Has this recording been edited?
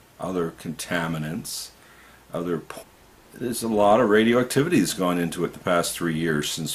no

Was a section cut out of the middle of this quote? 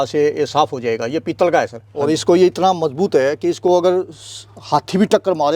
yes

